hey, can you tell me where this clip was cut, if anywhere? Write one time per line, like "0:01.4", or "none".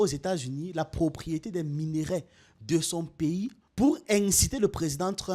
0:03.6